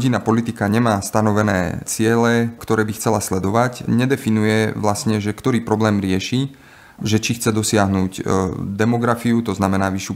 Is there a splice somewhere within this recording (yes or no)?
yes